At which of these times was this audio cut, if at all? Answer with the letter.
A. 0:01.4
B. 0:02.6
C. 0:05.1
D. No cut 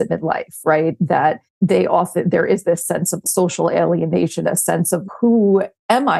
D